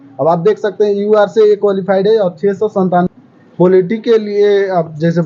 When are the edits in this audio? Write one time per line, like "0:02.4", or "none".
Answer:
0:03.1